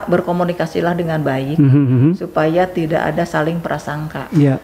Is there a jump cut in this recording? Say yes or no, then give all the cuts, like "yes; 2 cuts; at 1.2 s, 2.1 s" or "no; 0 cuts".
no; 0 cuts